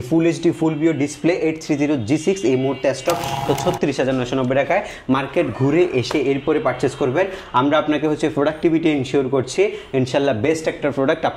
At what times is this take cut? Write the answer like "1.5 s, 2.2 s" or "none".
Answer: 3.4 s